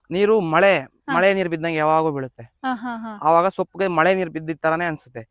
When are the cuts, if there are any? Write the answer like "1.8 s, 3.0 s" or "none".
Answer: none